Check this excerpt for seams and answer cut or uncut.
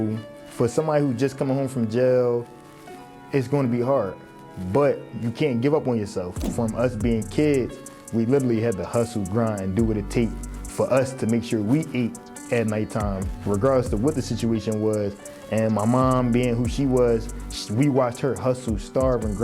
cut